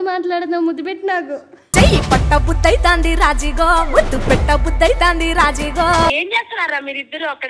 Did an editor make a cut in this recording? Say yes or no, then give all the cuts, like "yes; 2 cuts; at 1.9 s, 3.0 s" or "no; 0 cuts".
yes; 1 cut; at 6.1 s